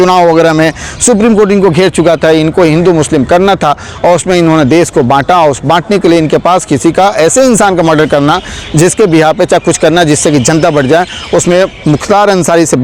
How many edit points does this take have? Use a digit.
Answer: 0